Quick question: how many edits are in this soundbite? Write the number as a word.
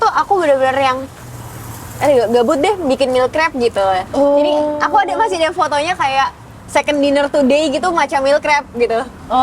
zero